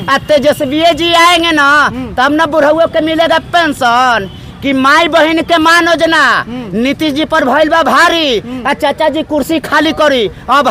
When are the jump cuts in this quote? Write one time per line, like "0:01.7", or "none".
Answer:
none